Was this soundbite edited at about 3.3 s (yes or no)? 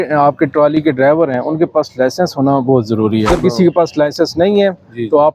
yes